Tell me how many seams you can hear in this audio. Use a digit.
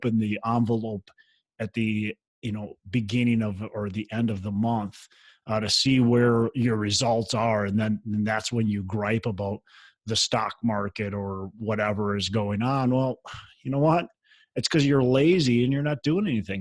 1